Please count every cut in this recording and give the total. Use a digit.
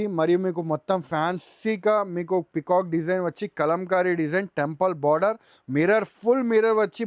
0